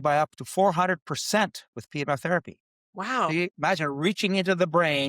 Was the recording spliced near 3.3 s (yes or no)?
yes